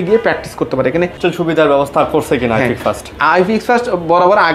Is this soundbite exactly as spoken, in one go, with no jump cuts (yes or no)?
no